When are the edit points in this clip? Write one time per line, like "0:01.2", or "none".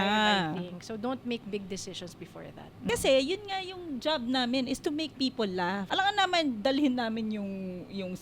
0:02.8
0:05.9